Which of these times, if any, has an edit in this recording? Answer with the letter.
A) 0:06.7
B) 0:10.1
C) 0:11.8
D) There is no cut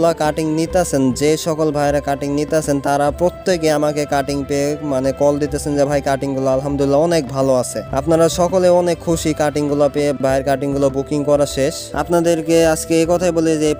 B